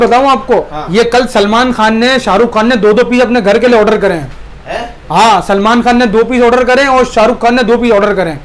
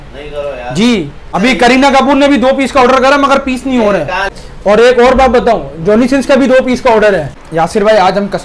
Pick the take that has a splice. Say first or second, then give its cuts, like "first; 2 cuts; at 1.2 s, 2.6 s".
second; 3 cuts; at 1.2 s, 4.4 s, 7.4 s